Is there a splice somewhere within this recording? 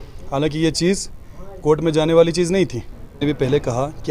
yes; 1 cut; at 3.2 s

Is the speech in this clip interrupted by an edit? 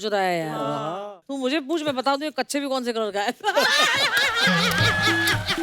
yes; 1 cut; at 1.1 s

